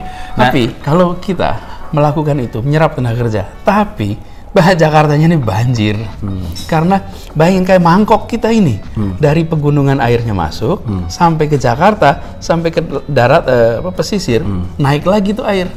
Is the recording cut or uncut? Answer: uncut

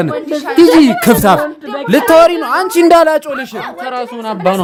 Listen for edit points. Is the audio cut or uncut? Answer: uncut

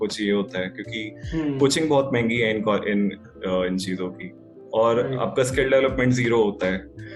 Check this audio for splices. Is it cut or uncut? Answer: uncut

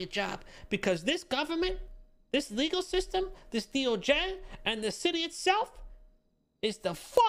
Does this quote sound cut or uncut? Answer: uncut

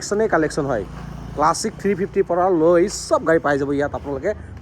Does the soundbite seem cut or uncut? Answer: uncut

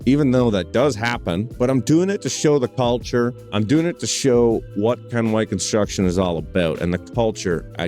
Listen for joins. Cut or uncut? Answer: cut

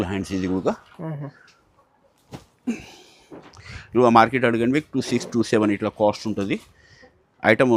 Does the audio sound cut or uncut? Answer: uncut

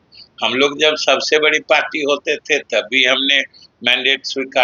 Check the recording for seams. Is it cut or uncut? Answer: uncut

